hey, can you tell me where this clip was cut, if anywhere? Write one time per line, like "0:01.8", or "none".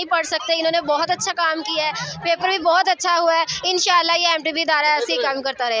none